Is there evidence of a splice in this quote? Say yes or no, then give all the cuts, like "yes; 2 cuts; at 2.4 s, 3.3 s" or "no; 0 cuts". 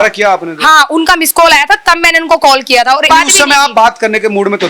yes; 1 cut; at 3.1 s